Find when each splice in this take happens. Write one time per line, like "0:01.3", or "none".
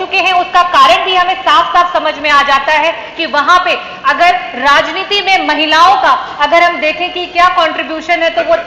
none